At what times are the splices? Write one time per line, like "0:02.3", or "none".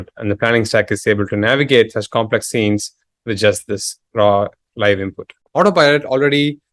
0:05.4